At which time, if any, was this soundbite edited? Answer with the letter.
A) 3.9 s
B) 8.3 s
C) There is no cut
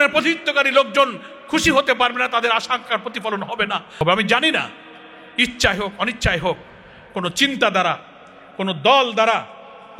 A